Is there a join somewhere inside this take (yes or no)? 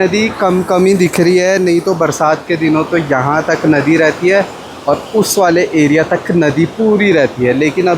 no